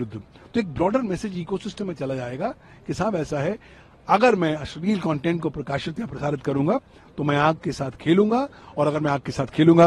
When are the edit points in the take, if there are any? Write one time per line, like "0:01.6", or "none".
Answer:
none